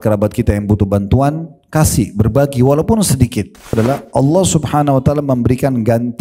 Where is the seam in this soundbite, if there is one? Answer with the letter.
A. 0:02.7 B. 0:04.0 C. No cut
B